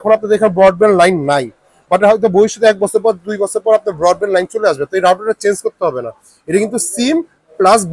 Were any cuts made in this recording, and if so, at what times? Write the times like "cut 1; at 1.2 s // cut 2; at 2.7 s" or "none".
none